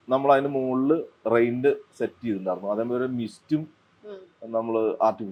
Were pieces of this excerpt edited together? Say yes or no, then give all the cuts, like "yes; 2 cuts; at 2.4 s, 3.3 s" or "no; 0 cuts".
no; 0 cuts